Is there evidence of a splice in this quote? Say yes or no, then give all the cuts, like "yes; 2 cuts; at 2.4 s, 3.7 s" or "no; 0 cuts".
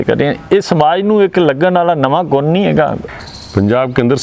yes; 1 cut; at 3.0 s